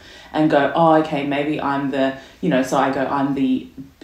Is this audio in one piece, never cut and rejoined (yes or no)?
yes